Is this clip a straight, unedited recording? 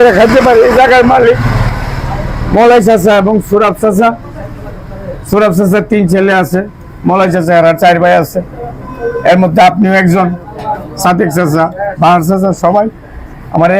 yes; 0 cuts

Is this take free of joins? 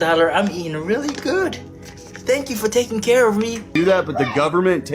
no; 1 cut; at 3.6 s

